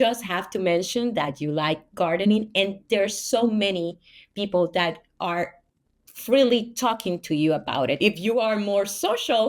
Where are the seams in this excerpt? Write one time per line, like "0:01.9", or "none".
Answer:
0:08.0